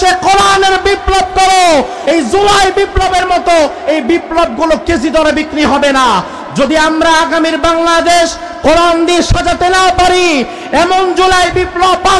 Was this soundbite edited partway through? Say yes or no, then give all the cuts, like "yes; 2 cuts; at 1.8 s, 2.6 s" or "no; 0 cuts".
yes; 1 cut; at 2.0 s